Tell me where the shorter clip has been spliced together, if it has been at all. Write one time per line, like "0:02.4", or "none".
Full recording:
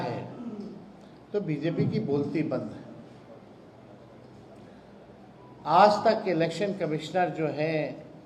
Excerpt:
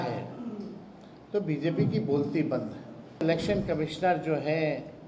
0:03.2